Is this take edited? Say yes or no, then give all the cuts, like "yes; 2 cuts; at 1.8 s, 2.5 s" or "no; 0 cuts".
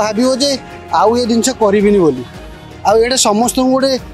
no; 0 cuts